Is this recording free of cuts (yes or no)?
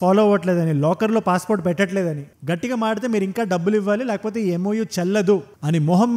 yes